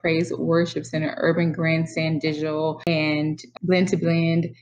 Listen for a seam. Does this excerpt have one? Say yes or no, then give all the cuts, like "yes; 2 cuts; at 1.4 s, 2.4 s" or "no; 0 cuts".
yes; 1 cut; at 2.9 s